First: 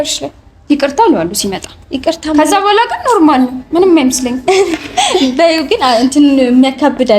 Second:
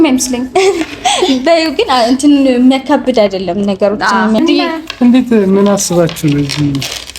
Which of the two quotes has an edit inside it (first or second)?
second